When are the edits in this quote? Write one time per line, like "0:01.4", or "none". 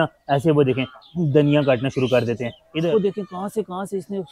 0:02.5